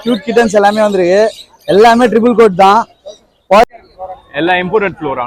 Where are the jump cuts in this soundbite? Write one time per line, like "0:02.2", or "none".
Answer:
0:03.6